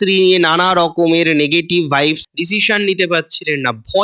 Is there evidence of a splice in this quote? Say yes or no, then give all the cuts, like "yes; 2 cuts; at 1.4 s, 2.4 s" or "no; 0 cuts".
yes; 1 cut; at 2.2 s